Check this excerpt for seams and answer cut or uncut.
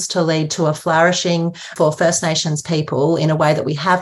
cut